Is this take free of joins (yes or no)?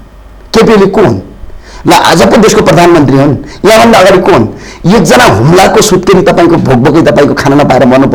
yes